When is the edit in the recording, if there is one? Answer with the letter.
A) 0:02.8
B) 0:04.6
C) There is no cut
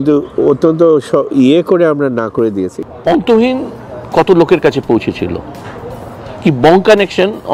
A